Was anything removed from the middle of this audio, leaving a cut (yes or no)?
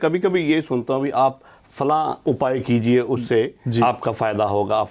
no